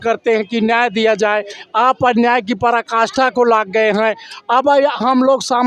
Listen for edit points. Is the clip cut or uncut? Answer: uncut